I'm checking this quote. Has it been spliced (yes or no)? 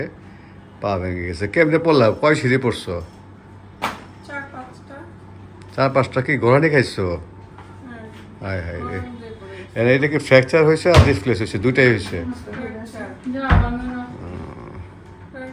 no